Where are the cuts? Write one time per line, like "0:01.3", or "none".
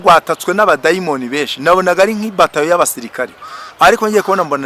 none

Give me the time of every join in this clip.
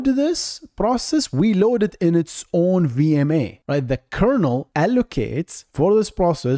0:03.6
0:04.7

